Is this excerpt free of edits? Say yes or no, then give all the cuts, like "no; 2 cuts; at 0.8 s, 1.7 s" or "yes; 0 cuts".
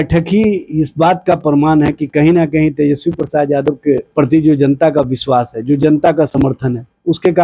yes; 0 cuts